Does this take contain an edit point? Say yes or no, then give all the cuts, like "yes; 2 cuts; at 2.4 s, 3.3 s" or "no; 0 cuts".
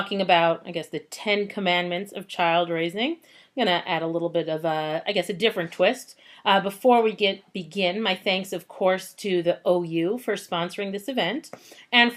no; 0 cuts